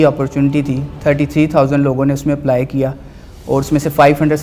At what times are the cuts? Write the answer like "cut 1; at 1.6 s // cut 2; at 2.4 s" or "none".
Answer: none